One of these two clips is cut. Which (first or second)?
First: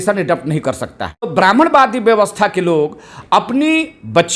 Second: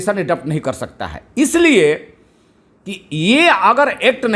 first